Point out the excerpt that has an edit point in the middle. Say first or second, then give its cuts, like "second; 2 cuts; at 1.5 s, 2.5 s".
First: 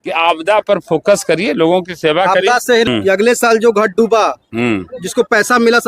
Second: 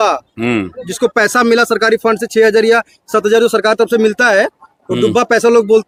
first; 1 cut; at 2.9 s